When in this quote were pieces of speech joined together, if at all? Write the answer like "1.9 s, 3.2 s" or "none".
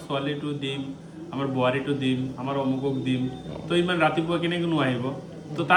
none